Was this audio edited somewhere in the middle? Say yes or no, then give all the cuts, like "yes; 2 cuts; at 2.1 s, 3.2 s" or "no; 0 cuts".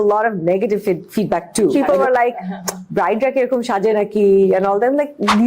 yes; 1 cut; at 1.7 s